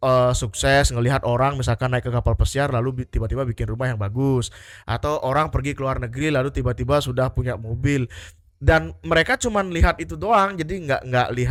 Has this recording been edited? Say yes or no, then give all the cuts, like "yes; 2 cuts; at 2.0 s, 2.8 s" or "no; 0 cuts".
no; 0 cuts